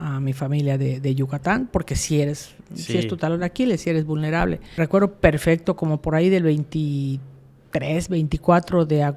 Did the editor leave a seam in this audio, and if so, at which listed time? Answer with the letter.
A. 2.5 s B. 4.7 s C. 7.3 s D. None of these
B